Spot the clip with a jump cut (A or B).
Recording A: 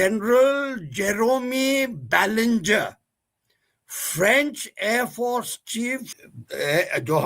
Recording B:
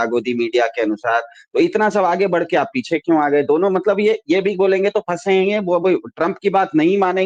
A